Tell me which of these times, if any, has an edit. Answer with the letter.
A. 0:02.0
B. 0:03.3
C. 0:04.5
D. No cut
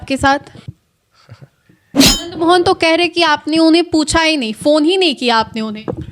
A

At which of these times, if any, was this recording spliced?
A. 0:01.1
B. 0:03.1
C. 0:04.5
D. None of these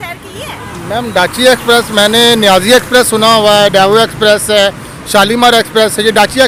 D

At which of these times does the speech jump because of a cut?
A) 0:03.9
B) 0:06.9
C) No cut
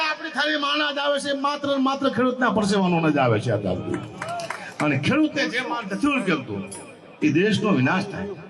C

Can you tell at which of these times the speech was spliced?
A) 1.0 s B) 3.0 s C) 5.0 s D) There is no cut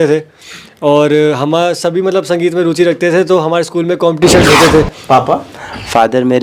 C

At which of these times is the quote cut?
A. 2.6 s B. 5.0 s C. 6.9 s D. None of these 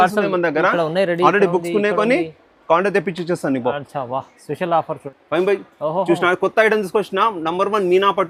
D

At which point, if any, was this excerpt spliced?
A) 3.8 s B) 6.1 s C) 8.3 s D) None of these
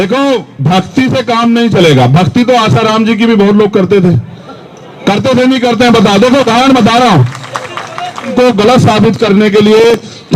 C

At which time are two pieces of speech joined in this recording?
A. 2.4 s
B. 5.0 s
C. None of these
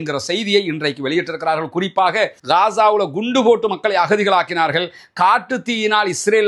A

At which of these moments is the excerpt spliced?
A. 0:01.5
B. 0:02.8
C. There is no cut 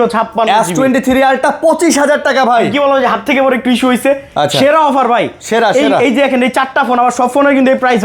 C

